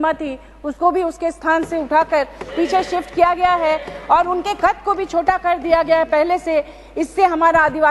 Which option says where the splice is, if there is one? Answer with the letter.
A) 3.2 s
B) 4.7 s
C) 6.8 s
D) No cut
D